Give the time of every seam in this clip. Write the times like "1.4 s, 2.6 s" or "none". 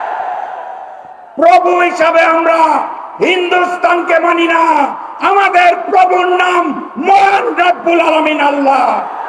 none

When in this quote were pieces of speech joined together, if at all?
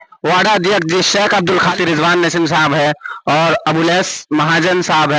1.7 s

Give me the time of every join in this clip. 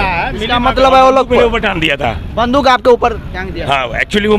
none

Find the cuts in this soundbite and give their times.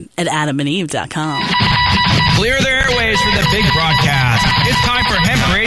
1.4 s

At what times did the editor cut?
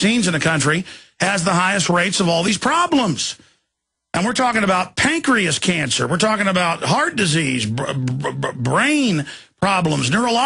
none

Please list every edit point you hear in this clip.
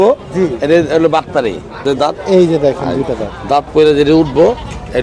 1.8 s

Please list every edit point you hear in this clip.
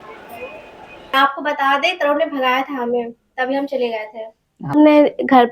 1.2 s, 4.7 s

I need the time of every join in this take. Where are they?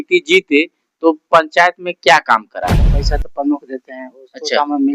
2.9 s

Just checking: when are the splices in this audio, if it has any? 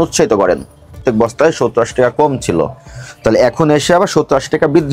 1.0 s

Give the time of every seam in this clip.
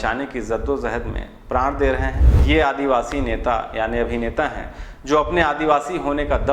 2.3 s

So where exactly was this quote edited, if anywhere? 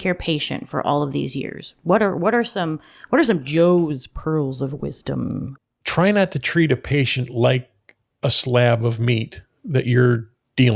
5.5 s

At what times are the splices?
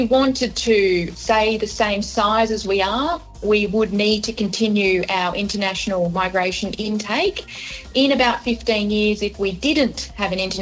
1.2 s

